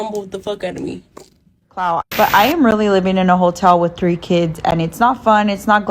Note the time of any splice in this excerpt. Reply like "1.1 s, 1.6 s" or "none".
1.9 s